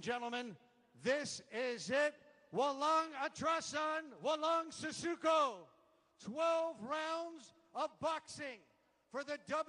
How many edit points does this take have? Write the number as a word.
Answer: one